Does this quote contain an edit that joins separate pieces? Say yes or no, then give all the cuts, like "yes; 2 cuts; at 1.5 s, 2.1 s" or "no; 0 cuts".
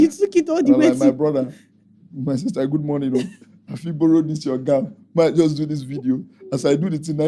no; 0 cuts